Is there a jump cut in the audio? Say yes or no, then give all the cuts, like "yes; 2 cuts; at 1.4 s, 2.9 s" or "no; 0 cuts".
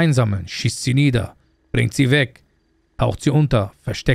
no; 0 cuts